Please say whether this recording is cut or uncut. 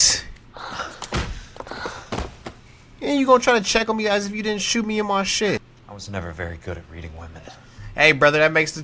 cut